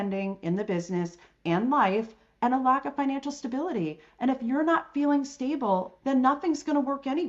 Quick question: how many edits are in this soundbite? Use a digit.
1